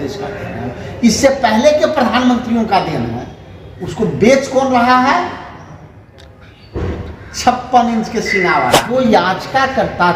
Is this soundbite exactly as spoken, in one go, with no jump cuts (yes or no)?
no